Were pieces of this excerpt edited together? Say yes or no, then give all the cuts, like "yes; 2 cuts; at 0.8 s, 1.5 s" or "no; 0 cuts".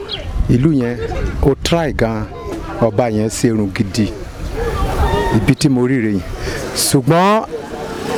no; 0 cuts